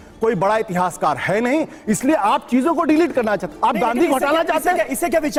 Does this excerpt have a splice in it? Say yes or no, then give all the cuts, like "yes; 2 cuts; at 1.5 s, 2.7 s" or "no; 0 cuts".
no; 0 cuts